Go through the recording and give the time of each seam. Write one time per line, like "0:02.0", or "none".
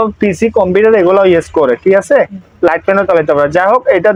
none